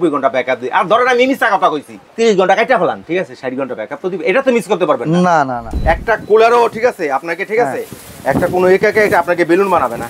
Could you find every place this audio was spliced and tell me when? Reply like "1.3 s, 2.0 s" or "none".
2.0 s, 5.7 s